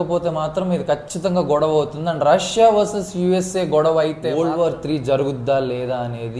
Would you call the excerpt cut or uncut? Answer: cut